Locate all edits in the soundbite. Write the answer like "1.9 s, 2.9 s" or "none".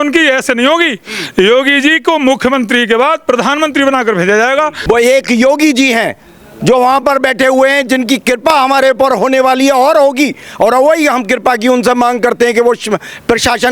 4.8 s